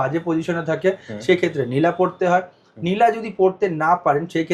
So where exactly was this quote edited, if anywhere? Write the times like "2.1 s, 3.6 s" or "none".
none